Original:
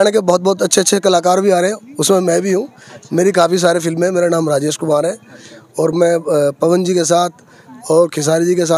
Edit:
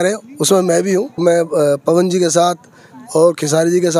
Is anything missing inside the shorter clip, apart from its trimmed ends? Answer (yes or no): yes